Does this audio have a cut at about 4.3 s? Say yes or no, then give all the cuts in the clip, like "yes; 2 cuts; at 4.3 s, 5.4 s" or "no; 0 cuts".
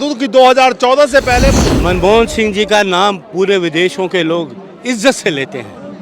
no; 1 cut; at 1.6 s